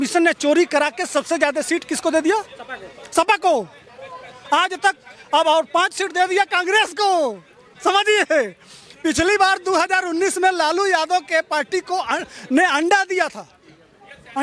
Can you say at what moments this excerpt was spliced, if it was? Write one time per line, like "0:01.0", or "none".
none